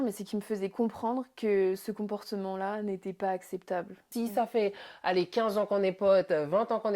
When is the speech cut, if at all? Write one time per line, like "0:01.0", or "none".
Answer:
0:04.0